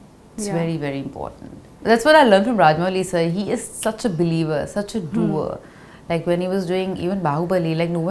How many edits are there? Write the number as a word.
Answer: one